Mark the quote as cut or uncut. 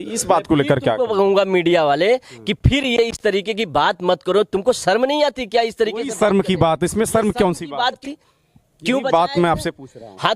cut